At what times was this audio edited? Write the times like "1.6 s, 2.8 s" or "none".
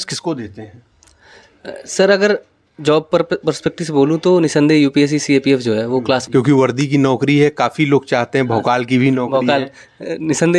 6.2 s